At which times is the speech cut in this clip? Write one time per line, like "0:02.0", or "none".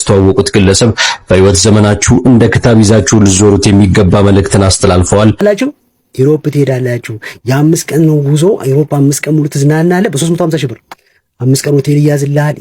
0:05.4